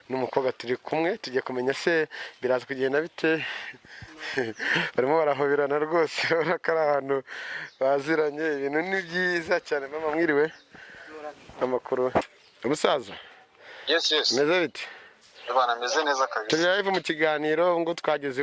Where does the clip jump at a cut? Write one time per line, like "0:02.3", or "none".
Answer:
0:12.2